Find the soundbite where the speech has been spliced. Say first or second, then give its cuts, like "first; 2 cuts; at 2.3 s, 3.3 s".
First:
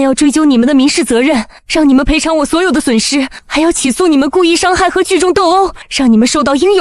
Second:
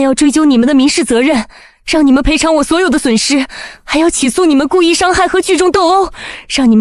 first; 3 cuts; at 1.6 s, 3.4 s, 5.8 s